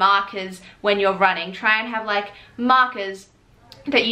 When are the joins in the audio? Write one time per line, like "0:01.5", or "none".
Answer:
none